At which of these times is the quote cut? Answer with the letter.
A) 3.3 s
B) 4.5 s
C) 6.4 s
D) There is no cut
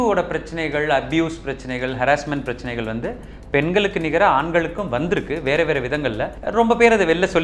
C